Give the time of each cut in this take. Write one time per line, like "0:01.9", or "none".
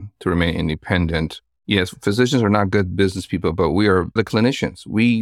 0:01.5
0:04.2